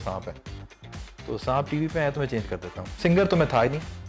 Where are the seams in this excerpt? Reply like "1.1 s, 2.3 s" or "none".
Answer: 2.8 s